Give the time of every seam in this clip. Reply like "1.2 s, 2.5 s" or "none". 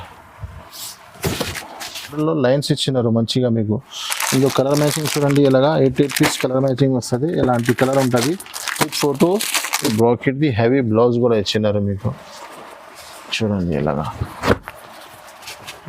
2.2 s, 9.9 s

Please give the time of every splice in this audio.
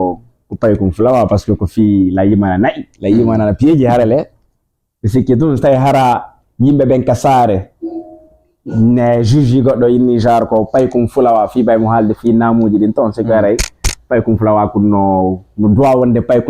none

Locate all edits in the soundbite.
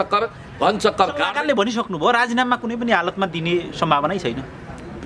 1.3 s

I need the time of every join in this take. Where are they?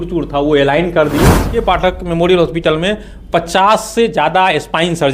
1.5 s

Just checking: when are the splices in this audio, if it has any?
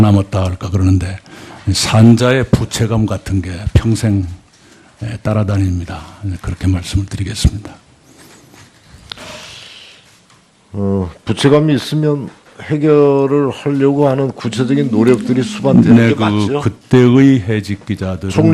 6.5 s

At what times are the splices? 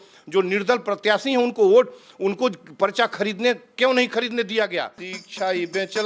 5.0 s

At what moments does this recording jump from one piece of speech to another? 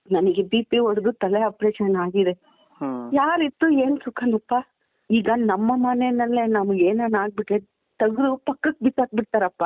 4.9 s

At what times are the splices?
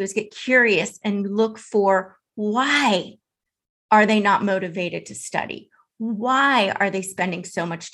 none

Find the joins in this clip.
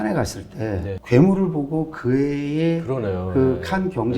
1.0 s

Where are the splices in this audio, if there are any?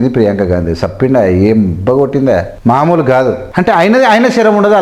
2.5 s, 3.5 s

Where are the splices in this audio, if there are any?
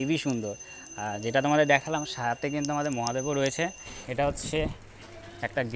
4.0 s

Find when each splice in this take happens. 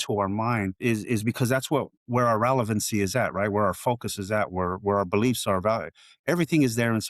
0.8 s, 2.0 s

